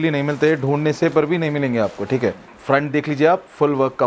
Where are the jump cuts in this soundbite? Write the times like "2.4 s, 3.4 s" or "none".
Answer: 2.5 s